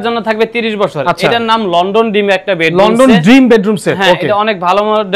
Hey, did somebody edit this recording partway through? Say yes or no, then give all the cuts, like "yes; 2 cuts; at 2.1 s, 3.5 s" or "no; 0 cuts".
no; 0 cuts